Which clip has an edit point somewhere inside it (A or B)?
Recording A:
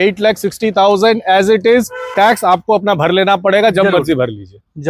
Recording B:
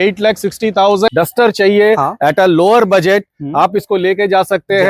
B